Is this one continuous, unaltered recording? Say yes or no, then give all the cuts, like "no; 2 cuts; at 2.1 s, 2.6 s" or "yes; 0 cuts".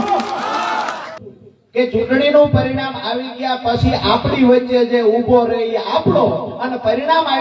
no; 1 cut; at 1.1 s